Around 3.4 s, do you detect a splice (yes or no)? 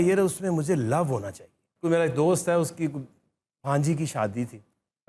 no